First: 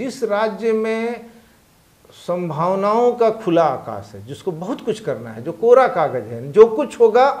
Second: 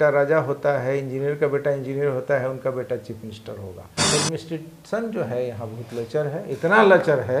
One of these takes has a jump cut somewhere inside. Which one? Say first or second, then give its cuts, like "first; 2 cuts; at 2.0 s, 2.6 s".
second; 1 cut; at 4.1 s